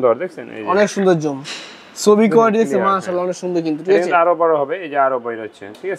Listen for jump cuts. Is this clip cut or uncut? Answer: uncut